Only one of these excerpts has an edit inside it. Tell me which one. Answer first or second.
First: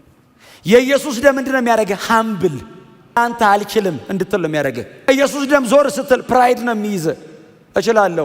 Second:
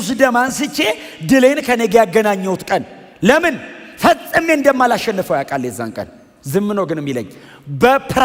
first